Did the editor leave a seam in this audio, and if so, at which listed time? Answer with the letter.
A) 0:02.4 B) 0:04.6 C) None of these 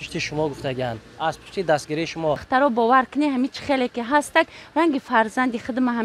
A